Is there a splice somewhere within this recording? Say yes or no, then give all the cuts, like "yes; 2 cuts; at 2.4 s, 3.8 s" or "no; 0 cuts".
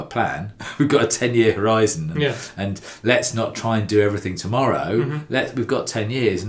no; 0 cuts